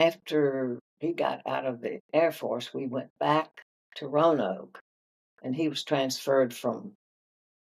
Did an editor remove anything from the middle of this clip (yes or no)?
yes